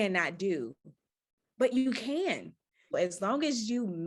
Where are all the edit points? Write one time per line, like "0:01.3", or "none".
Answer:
0:02.9